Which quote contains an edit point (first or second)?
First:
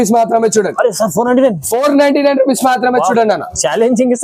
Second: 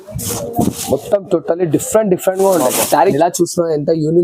second